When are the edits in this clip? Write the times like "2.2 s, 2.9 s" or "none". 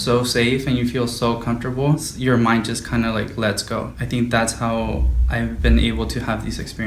2.1 s, 4.0 s